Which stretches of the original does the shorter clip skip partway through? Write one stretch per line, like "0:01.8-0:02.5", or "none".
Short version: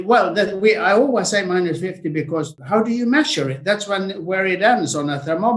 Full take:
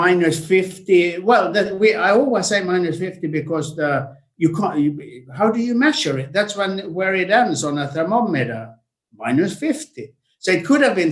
0:03.7-0:05.2